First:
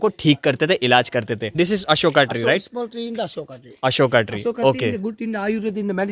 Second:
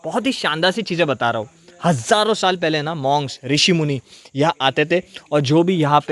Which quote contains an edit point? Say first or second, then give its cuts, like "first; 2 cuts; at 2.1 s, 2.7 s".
first; 1 cut; at 1.4 s